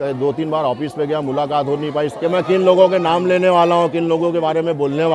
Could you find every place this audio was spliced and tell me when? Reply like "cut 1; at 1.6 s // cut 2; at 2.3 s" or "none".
cut 1; at 2.1 s